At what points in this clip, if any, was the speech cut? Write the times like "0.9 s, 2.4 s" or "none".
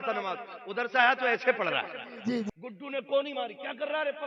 2.5 s